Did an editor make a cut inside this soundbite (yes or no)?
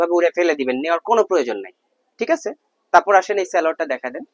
no